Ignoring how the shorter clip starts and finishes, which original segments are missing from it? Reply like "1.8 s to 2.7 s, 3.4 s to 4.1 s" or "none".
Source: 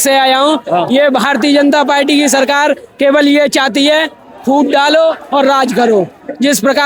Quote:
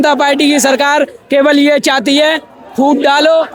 none